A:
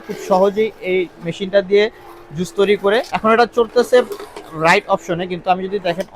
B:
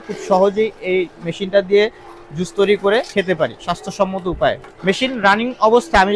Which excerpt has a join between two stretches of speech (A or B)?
A